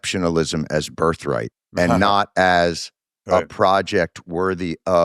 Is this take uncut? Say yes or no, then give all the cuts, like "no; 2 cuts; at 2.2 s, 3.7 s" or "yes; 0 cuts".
no; 1 cut; at 1.6 s